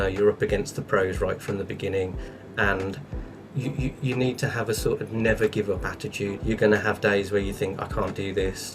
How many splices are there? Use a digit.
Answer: 1